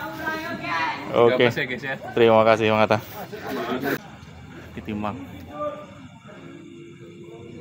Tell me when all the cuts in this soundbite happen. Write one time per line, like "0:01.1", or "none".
0:03.7